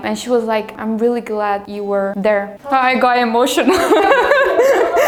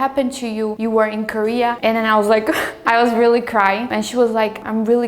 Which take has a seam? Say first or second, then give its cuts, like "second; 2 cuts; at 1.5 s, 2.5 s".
second; 2 cuts; at 1.8 s, 2.8 s